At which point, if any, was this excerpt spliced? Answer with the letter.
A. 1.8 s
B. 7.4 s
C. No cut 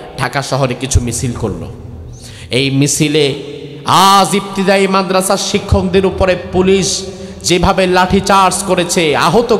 C